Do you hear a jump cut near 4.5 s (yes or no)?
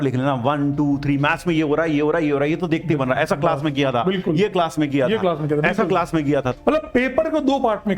no